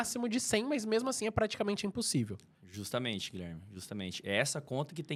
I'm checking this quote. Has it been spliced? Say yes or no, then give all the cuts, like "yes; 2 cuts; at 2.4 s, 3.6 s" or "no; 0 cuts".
no; 0 cuts